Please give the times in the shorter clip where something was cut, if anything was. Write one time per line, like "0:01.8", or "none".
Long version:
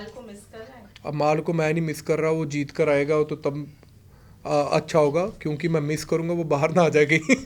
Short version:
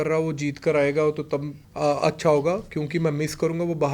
0:01.6